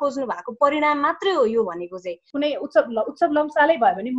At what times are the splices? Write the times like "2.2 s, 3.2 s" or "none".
2.2 s